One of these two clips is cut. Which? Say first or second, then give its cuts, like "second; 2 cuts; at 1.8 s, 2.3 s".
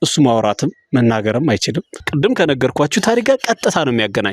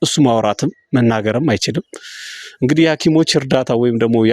first; 1 cut; at 1.9 s